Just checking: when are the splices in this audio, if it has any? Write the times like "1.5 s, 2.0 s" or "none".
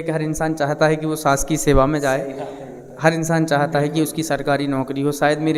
none